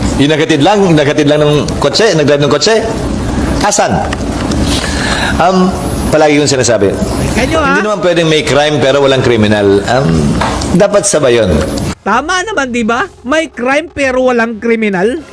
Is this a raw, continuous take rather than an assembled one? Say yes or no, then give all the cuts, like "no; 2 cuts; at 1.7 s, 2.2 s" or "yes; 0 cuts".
yes; 0 cuts